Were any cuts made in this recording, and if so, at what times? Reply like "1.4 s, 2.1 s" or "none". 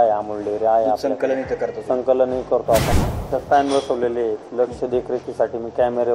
2.9 s